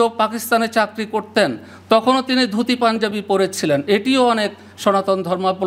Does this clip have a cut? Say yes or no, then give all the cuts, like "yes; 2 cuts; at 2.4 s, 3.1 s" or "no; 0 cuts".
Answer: no; 0 cuts